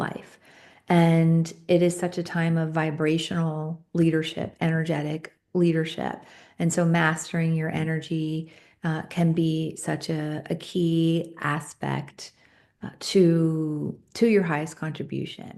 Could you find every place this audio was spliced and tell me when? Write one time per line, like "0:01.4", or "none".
none